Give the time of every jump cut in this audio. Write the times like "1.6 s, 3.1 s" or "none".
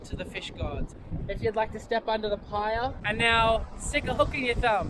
1.0 s, 3.0 s